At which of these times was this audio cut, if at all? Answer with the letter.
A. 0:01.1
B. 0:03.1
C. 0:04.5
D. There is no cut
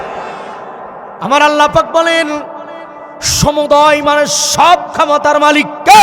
A